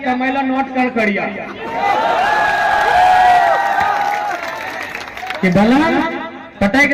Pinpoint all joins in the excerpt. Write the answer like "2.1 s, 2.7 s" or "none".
none